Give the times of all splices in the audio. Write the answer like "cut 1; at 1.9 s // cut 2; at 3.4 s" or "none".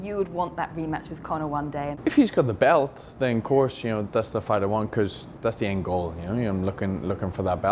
cut 1; at 1.9 s // cut 2; at 4.0 s // cut 3; at 5.2 s

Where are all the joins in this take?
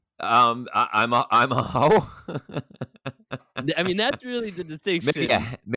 none

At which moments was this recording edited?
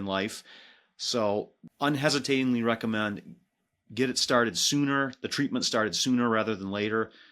none

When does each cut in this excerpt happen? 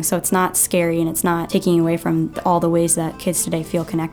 cut 1; at 1.5 s // cut 2; at 3.2 s

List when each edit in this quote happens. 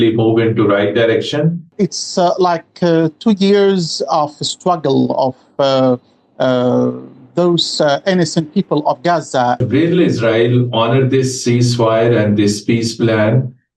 cut 1; at 1.6 s // cut 2; at 9.6 s

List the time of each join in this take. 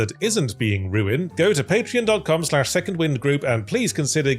cut 1; at 1.2 s

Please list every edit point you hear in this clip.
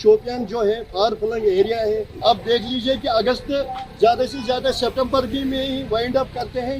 cut 1; at 2.1 s

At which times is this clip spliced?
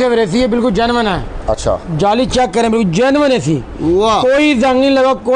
none

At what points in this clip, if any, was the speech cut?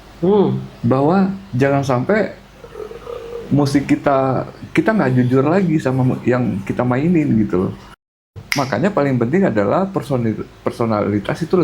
cut 1; at 8.2 s

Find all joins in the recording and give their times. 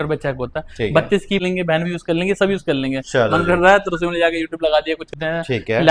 cut 1; at 1.4 s // cut 2; at 5.1 s

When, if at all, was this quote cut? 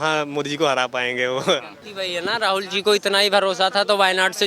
cut 1; at 1.8 s

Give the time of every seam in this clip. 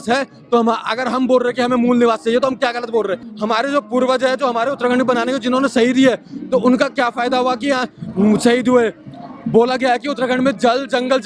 cut 1; at 3.3 s

